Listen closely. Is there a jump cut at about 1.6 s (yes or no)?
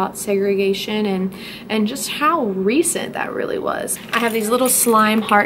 no